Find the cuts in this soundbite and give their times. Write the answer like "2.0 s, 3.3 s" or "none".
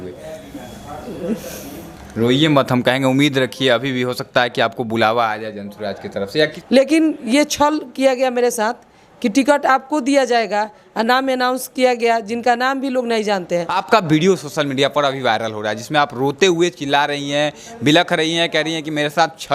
6.6 s, 13.8 s